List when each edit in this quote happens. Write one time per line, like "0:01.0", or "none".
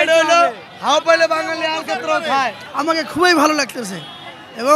0:02.6